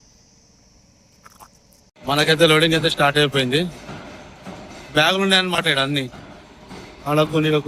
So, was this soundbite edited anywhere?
yes; 1 cut; at 2.0 s

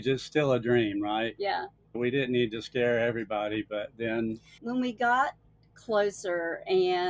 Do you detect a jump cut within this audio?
yes; 2 cuts; at 1.9 s, 4.6 s

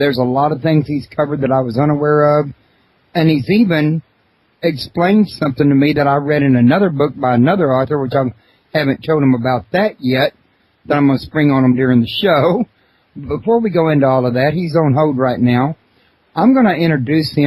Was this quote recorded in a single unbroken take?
no; 1 cut; at 5.8 s

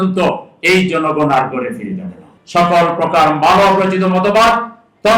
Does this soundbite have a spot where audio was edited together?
yes; 1 cut; at 2.3 s

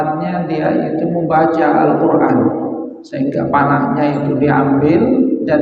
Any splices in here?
no; 0 cuts

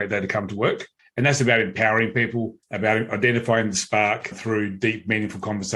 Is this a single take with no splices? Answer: no; 2 cuts; at 1.0 s, 2.6 s

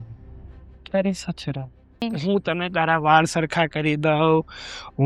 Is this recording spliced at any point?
yes; 1 cut; at 2.1 s

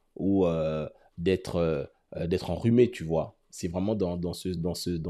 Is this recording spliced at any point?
no; 0 cuts

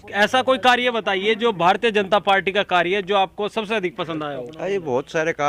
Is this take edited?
no; 0 cuts

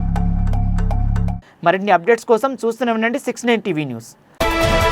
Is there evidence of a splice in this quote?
no; 0 cuts

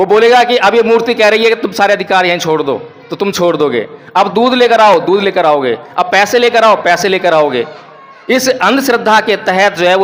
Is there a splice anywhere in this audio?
no; 0 cuts

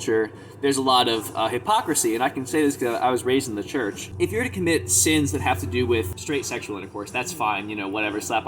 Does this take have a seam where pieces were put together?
yes; 2 cuts; at 4.0 s, 6.2 s

